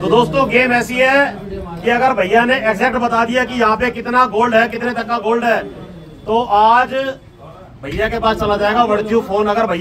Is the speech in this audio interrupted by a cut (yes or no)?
no